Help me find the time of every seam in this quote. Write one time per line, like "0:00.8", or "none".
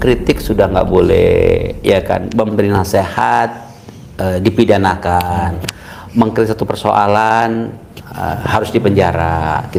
none

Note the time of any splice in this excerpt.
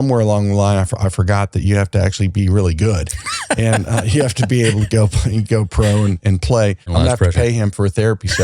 0:06.9

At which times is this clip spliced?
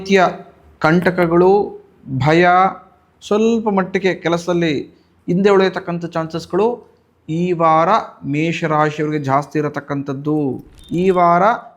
0:10.8

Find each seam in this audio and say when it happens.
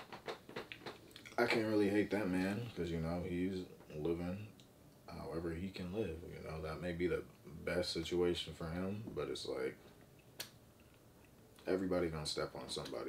none

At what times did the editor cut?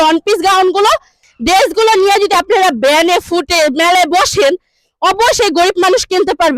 0:01.2

